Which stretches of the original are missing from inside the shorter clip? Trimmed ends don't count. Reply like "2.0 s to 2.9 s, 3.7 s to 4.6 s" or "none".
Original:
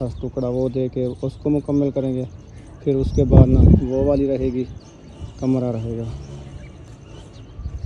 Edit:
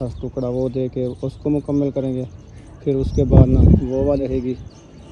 4.2 s to 4.3 s